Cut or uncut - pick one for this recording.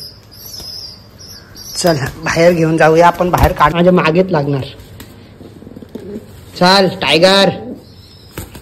cut